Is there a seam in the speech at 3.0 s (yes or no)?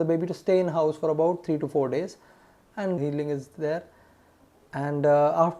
yes